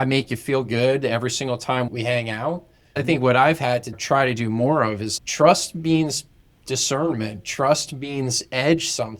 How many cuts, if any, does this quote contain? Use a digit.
3